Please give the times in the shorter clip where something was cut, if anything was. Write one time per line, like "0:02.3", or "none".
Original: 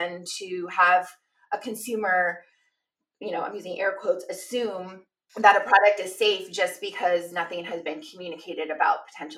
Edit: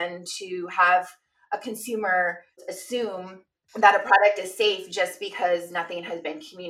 0:02.6